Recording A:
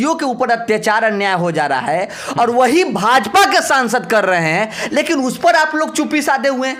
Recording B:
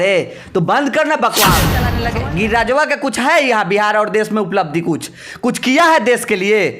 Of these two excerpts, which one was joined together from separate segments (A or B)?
B